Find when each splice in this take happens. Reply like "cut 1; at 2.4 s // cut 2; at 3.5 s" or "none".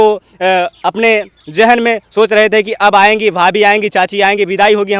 none